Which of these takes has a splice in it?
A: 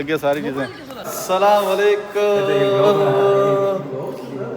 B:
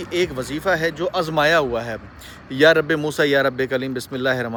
A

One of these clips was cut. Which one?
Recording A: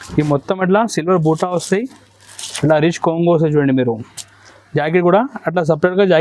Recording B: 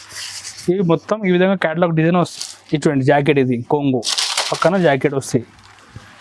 B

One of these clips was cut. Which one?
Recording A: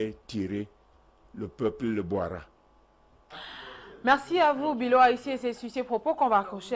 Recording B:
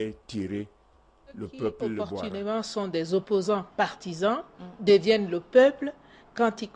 B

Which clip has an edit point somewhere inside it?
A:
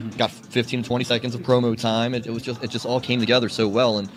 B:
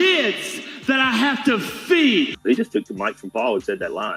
B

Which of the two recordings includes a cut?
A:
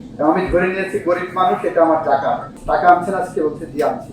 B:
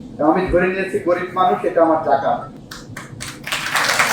A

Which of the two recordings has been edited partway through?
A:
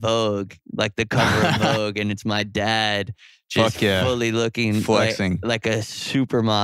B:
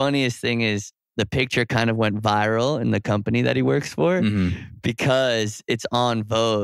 B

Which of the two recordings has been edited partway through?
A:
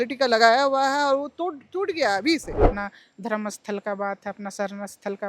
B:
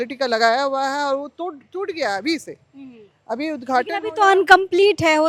A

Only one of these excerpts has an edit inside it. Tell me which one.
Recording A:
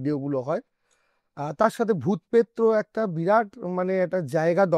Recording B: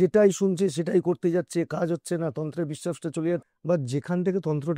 B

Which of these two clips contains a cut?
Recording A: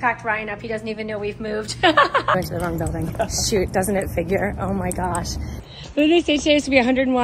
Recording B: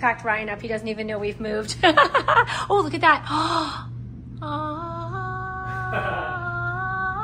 A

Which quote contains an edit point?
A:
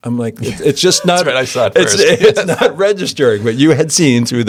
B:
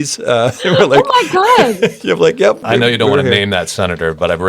B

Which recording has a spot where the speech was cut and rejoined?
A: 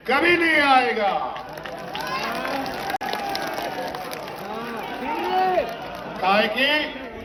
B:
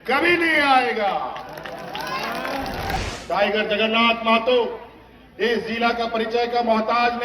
B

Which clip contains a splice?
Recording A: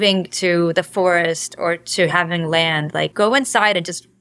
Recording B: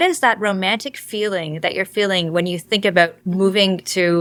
A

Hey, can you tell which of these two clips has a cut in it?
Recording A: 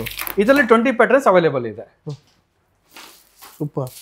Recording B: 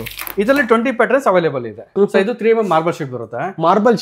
B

